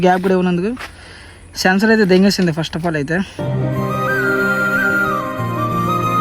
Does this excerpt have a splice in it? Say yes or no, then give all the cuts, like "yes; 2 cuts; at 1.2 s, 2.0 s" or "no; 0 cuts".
yes; 1 cut; at 3.4 s